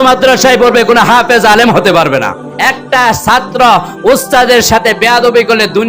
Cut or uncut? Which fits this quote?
cut